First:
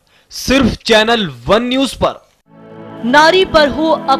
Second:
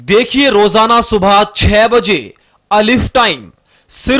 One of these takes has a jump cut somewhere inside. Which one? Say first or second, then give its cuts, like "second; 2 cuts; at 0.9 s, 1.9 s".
first; 1 cut; at 2.4 s